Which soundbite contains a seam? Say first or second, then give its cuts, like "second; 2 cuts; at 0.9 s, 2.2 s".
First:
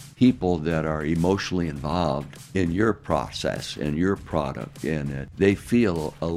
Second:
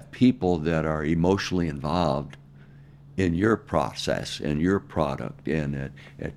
first; 2 cuts; at 2.4 s, 5.3 s